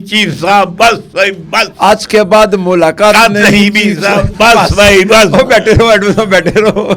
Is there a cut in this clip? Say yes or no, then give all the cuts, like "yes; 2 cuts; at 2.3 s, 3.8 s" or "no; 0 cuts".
no; 0 cuts